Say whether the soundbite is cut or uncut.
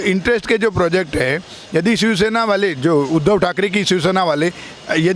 uncut